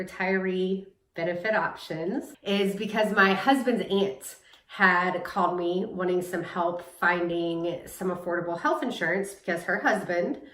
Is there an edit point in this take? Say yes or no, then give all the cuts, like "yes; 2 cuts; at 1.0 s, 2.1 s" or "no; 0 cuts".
yes; 1 cut; at 2.3 s